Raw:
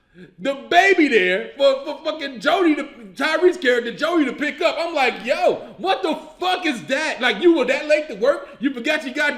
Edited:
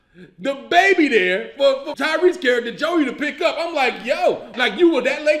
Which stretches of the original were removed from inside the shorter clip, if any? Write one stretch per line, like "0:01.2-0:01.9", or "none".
0:01.9-0:03.1
0:05.7-0:07.1